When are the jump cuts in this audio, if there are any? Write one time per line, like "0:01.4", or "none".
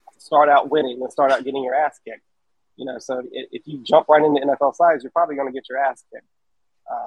none